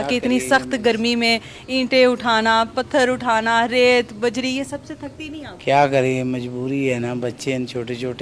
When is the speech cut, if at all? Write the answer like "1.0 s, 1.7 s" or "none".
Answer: none